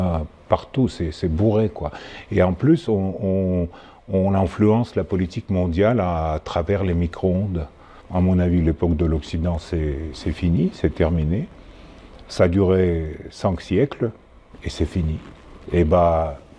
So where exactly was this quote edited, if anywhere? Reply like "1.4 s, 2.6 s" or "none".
7.9 s